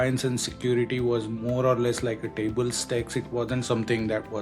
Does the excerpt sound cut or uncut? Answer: uncut